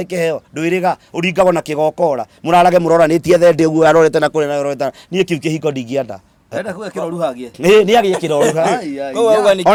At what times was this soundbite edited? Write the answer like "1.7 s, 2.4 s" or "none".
none